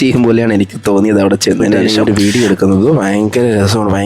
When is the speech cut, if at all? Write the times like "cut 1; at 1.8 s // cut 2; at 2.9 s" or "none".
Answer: cut 1; at 1.9 s

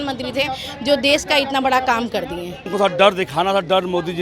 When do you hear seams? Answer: cut 1; at 2.7 s

